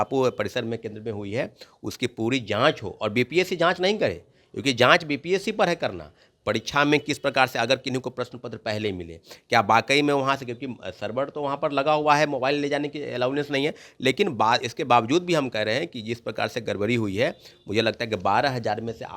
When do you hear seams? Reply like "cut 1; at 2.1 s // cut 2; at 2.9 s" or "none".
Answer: none